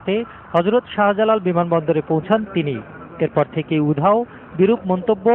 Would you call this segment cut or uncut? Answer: cut